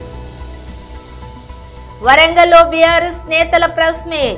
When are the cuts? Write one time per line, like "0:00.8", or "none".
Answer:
0:00.9